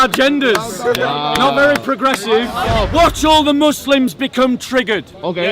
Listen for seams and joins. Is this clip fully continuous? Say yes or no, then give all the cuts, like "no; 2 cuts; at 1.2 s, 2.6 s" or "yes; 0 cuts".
no; 1 cut; at 2.7 s